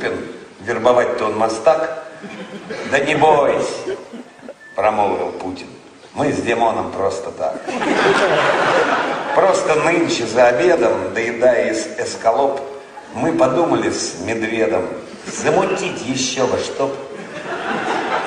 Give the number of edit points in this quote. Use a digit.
1